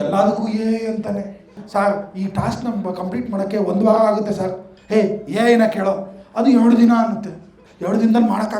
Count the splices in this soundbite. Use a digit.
1